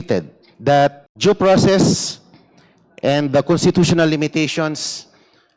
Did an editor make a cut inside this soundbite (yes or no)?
yes